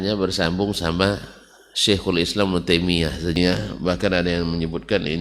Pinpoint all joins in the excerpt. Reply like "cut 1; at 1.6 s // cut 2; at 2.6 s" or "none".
cut 1; at 3.4 s